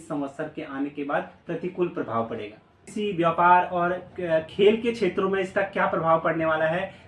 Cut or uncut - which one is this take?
cut